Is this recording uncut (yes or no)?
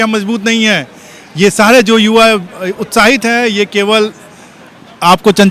yes